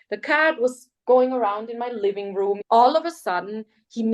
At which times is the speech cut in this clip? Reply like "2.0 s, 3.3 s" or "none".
2.6 s